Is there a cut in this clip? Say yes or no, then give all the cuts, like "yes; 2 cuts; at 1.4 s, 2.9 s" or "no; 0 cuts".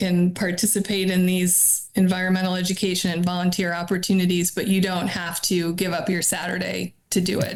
no; 0 cuts